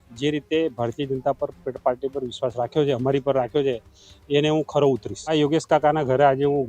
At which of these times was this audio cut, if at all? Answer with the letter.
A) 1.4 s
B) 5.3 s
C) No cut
B